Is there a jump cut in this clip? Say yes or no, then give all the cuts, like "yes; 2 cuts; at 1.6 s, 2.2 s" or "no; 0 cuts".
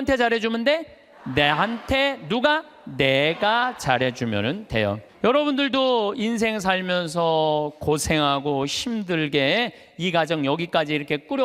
yes; 1 cut; at 5.1 s